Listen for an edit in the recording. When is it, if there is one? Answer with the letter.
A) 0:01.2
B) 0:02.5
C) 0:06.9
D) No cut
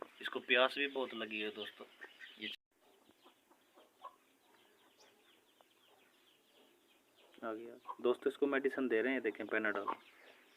B